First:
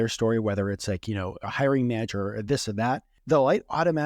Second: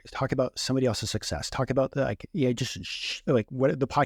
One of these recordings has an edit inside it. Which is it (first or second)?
first